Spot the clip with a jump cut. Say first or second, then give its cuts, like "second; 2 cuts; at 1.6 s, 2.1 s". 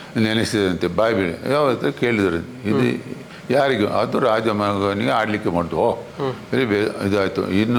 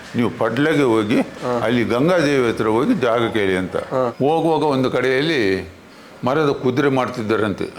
second; 1 cut; at 4.1 s